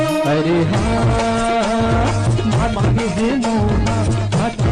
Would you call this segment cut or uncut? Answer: uncut